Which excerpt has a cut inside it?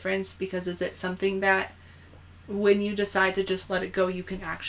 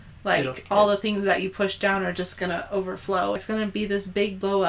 second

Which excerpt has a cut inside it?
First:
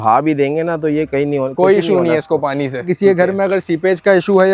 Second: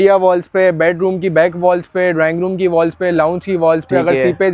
first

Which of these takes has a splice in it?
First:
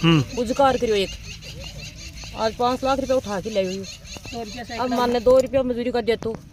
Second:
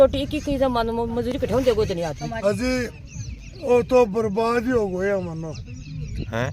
second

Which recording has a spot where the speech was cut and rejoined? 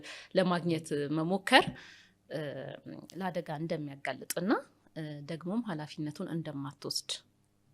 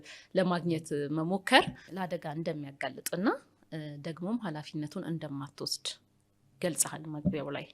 second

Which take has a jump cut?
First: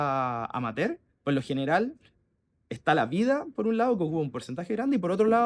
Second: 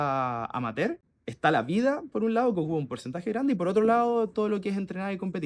second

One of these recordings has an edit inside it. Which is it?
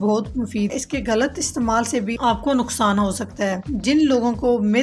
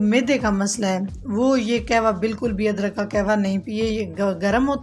first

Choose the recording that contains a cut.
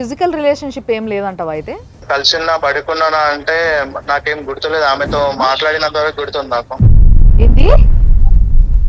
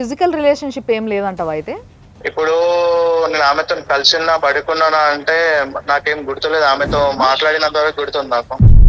first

